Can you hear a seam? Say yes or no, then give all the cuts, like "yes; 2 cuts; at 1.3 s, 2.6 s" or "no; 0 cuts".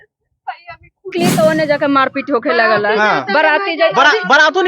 yes; 1 cut; at 1.1 s